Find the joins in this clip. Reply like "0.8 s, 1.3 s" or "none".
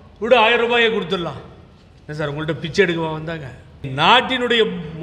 3.8 s